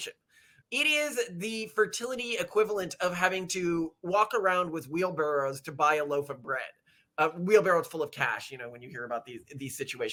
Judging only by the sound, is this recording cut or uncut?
uncut